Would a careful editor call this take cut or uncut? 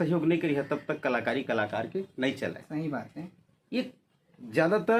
uncut